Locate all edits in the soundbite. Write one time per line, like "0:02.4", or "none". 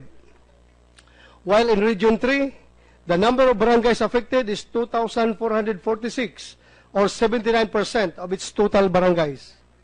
none